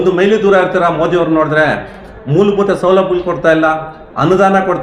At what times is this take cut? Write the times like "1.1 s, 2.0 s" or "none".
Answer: 2.0 s